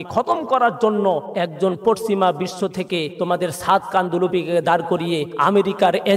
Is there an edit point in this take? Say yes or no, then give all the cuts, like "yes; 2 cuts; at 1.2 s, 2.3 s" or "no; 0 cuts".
yes; 3 cuts; at 1.3 s, 3.1 s, 5.3 s